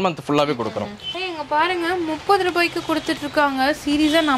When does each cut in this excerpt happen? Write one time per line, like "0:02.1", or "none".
0:01.2